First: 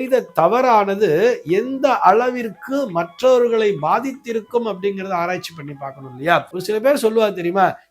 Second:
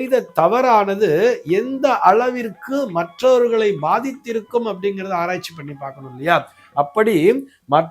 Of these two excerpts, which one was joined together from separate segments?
first; 1 cut; at 6.5 s

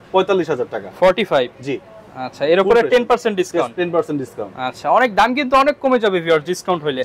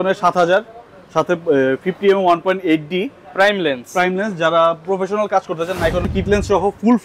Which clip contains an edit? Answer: second; 1 cut; at 6.1 s

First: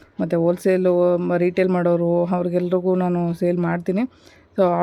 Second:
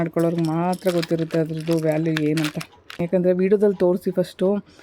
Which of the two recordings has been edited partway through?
second; 1 cut; at 3.0 s

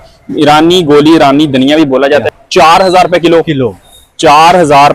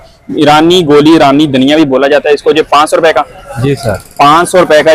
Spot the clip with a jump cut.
first; 1 cut; at 2.2 s

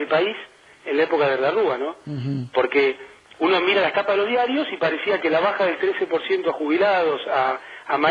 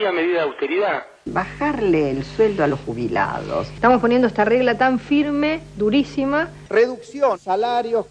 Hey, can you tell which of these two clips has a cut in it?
second; 2 cuts; at 1.1 s, 6.6 s

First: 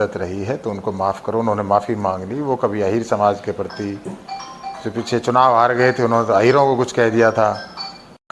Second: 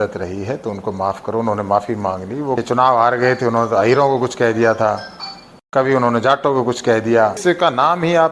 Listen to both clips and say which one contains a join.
second; 2 cuts; at 2.6 s, 7.4 s

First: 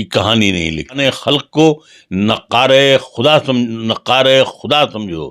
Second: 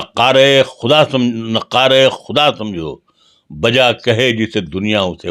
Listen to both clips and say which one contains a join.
first; 1 cut; at 1.0 s

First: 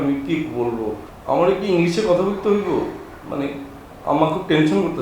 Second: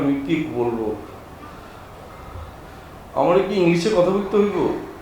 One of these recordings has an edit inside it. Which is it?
first; 1 cut; at 1.1 s

